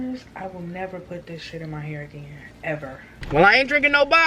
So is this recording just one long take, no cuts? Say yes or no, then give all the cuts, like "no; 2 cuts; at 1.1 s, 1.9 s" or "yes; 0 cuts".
no; 1 cut; at 3.1 s